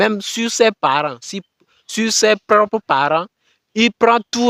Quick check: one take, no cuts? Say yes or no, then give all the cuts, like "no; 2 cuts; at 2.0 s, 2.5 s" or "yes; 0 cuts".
yes; 0 cuts